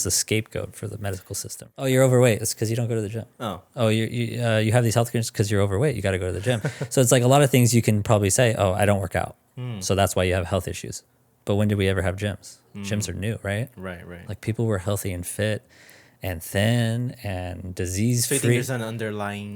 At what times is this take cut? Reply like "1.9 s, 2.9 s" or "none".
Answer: 1.6 s